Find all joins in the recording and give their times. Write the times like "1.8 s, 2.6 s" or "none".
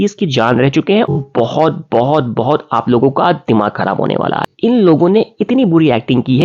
1.2 s, 4.5 s